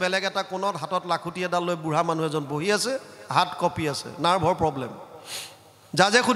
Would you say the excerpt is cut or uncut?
uncut